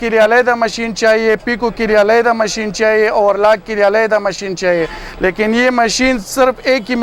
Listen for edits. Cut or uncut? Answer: uncut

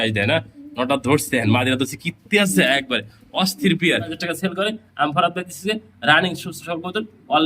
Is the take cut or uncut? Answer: cut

